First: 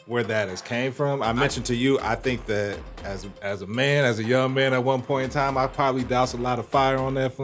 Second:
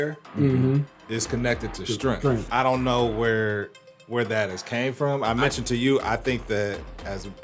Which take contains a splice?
second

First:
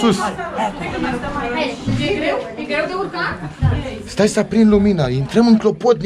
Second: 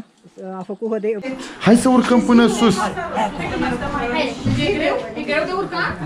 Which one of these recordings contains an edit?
second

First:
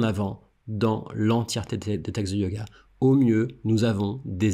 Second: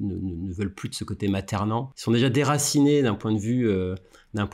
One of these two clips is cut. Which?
second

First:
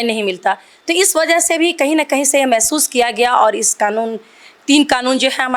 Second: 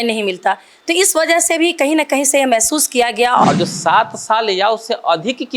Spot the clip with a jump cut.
second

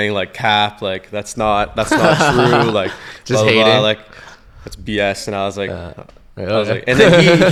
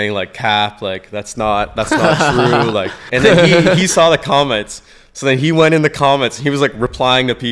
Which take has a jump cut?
second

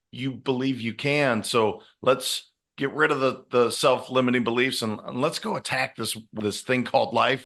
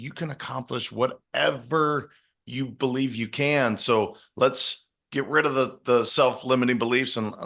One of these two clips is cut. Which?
first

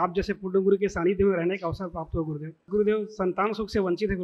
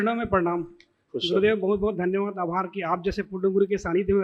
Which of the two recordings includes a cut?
first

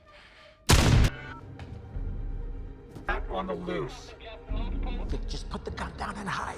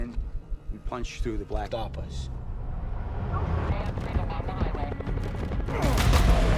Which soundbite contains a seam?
second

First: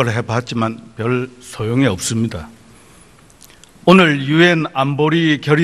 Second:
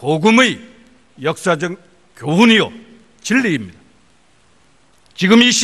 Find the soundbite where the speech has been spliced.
second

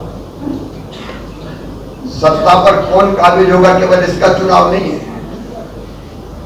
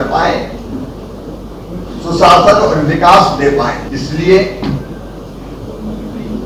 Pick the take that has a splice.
second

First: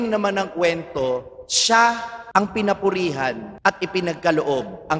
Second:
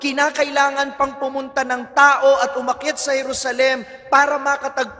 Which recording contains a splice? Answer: first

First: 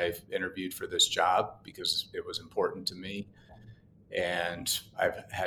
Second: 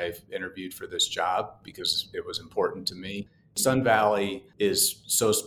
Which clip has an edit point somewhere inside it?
second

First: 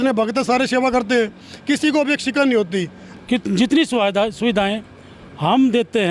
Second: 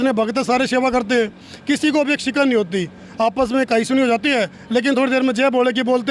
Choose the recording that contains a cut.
first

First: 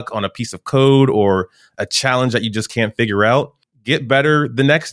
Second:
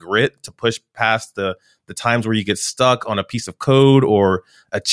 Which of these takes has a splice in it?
first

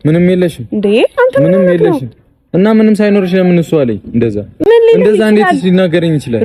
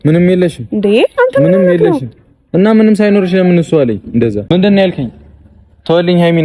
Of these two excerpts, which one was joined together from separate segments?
second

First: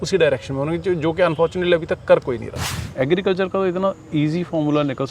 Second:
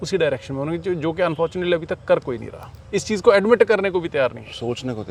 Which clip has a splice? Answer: first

